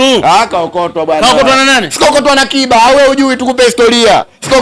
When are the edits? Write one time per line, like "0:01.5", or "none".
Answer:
none